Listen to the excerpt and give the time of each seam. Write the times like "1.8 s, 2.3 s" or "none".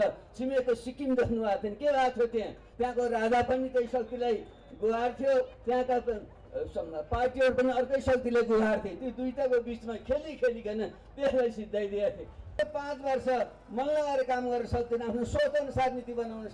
12.6 s